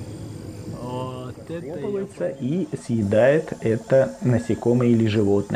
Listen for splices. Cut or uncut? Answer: cut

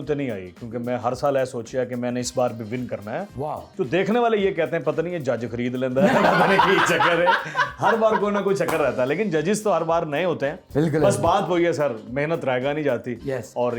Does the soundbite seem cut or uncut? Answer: uncut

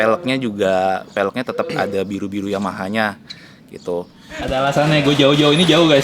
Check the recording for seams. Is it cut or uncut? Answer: cut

